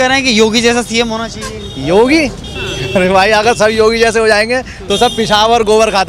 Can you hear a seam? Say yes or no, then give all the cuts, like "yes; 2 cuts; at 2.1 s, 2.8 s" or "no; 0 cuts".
no; 0 cuts